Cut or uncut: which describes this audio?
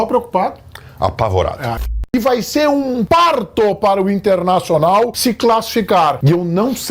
cut